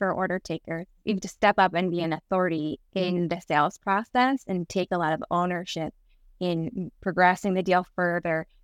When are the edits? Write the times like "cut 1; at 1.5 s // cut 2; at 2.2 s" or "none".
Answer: cut 1; at 0.9 s